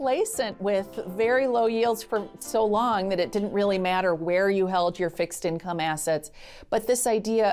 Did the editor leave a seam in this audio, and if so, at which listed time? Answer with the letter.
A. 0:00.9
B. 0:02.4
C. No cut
B